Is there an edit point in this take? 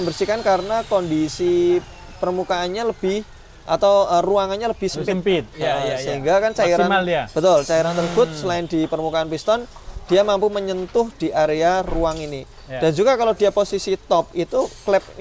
no; 0 cuts

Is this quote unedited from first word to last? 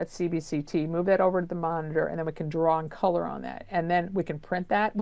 yes; 0 cuts

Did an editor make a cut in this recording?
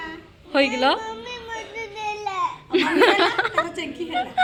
no; 0 cuts

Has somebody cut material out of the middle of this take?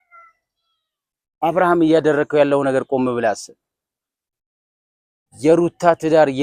no; 0 cuts

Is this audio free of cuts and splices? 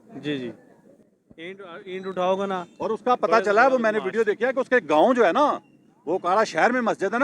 yes; 0 cuts

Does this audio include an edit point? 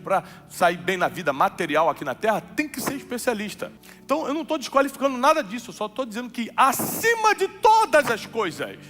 yes; 1 cut; at 3.9 s

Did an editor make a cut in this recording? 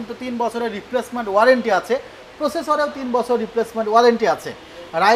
no; 0 cuts

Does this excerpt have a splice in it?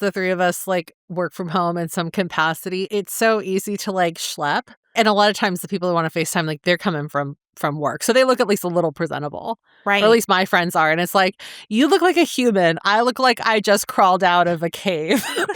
yes; 2 cuts; at 2.9 s, 4.9 s

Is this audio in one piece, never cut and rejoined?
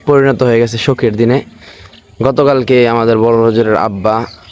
yes; 0 cuts

